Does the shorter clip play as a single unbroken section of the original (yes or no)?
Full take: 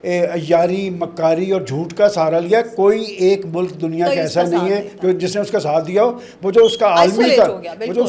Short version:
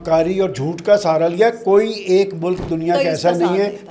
yes